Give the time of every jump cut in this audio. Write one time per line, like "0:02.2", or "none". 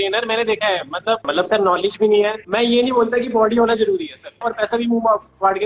0:01.3
0:02.4
0:04.4